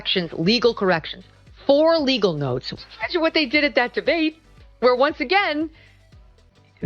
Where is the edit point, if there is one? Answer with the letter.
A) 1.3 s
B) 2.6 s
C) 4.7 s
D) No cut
B